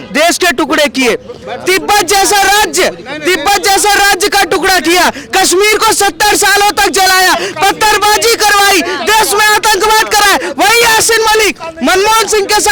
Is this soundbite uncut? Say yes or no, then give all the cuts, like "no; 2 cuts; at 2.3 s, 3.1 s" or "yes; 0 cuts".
yes; 0 cuts